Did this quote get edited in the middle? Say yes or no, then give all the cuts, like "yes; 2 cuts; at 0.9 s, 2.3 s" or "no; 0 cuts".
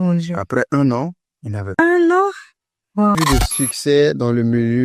yes; 1 cut; at 3.2 s